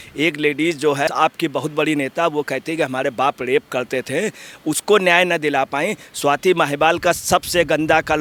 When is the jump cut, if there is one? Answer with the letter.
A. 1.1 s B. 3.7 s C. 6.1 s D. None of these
D